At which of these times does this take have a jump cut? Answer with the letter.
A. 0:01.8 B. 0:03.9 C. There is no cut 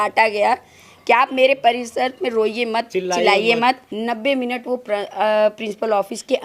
B